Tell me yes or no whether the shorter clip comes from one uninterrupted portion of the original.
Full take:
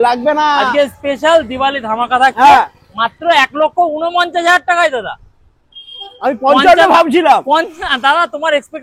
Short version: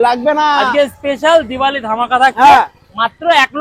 yes